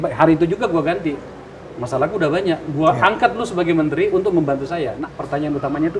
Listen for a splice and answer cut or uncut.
cut